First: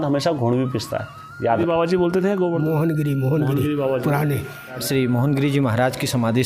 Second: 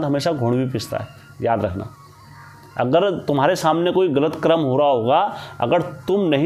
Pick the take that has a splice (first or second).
first